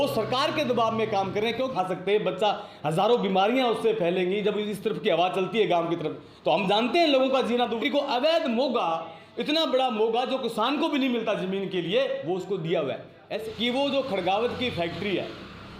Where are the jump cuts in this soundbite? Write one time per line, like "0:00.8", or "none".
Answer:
0:01.7
0:07.8
0:13.5

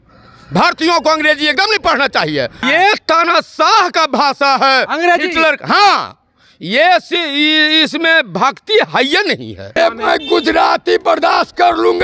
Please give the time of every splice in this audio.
0:02.6
0:09.7

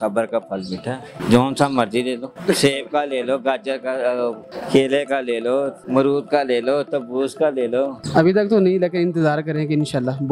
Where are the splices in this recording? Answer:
0:01.1
0:02.3
0:04.5
0:05.8
0:08.0

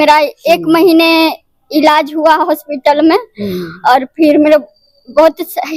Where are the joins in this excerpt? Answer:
none

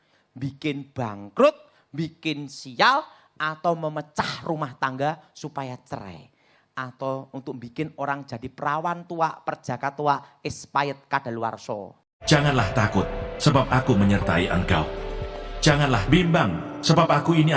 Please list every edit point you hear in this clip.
0:12.1

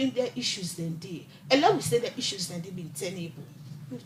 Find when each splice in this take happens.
none

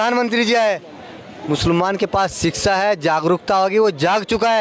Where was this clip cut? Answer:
none

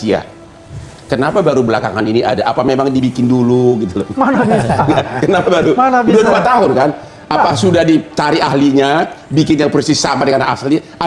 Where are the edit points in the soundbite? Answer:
none

